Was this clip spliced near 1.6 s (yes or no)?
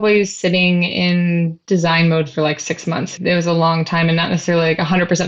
yes